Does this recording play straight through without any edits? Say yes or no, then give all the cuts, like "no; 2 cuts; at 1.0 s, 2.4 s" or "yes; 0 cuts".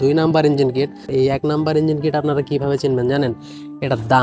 yes; 0 cuts